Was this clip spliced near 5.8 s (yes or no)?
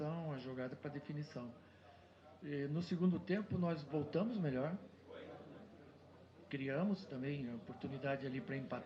no